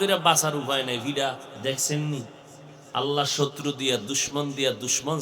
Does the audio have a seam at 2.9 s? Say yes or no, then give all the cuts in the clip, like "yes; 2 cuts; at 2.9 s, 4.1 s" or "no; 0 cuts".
no; 1 cut; at 1.5 s